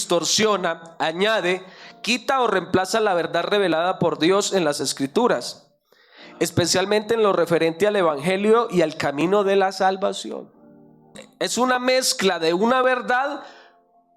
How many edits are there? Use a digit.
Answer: 1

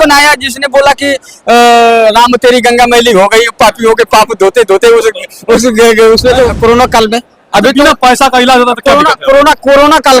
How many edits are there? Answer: 1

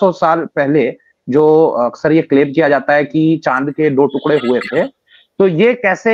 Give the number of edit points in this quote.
0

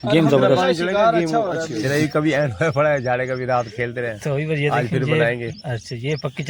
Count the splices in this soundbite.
1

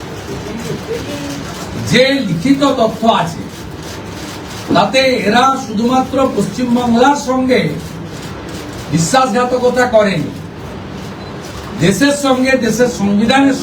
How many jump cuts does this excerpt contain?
0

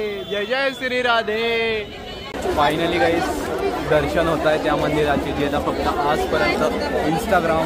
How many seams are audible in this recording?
1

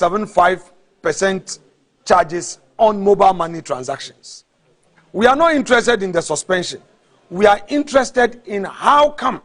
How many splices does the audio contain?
0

